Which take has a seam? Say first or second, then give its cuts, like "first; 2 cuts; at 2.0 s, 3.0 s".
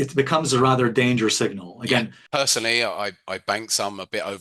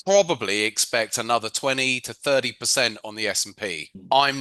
first; 1 cut; at 2.2 s